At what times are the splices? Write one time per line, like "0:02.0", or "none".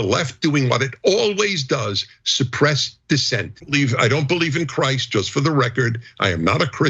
0:03.6